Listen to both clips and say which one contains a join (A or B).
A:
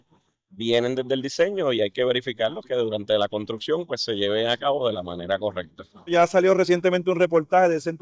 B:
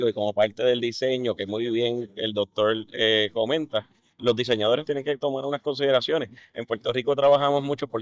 A